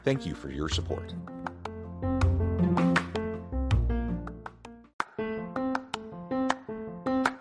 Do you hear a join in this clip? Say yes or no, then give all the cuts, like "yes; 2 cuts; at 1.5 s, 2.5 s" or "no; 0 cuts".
yes; 1 cut; at 4.8 s